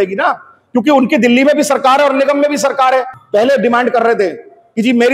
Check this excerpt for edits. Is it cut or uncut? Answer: cut